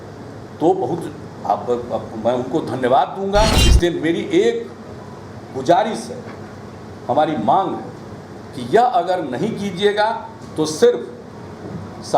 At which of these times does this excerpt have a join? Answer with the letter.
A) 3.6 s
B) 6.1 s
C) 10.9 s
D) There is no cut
A